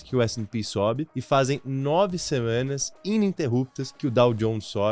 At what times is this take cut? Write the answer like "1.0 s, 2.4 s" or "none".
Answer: 1.1 s, 3.8 s

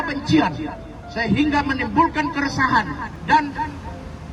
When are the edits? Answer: 3.1 s

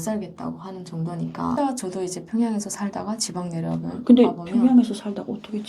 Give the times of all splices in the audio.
1.6 s

